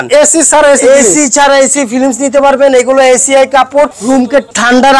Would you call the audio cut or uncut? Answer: cut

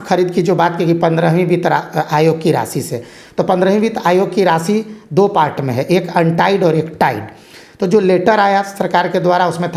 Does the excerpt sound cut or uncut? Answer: uncut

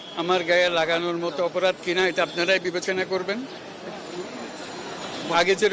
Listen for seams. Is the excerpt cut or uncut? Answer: cut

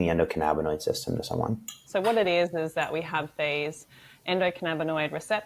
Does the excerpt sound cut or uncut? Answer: cut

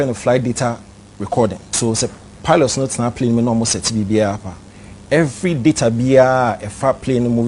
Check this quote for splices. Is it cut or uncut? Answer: cut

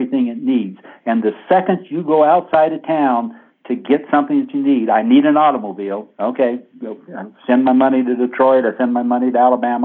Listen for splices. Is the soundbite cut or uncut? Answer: uncut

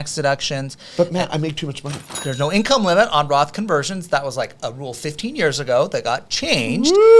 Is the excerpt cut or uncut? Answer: cut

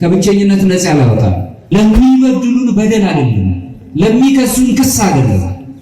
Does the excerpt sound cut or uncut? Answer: cut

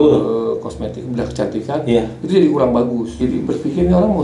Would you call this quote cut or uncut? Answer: cut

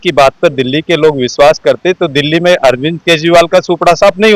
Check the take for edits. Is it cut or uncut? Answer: uncut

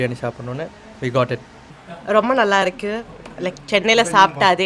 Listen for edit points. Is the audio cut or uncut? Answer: cut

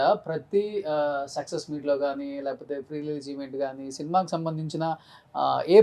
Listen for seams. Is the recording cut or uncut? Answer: uncut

